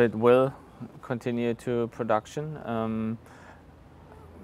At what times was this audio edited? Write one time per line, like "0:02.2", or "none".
none